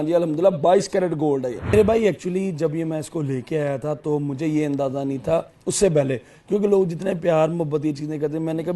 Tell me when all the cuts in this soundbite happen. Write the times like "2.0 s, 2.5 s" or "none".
1.7 s

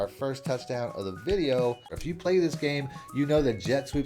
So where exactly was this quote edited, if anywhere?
1.9 s

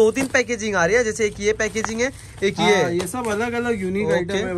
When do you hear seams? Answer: none

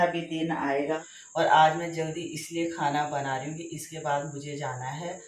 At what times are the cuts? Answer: 1.1 s

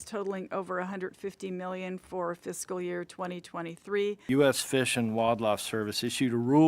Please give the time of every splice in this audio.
4.2 s

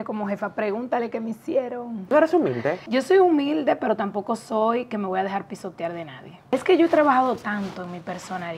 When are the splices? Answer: 2.1 s, 2.8 s, 6.4 s

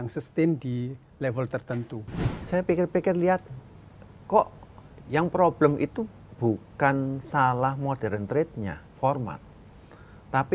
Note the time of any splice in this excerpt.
2.1 s

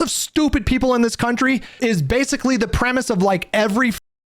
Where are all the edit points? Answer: 1.8 s

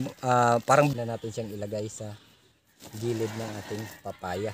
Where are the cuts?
0.9 s

